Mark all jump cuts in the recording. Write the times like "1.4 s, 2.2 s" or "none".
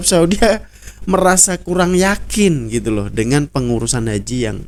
none